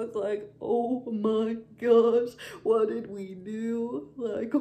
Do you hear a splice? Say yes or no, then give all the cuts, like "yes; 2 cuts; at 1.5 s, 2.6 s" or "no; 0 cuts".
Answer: no; 0 cuts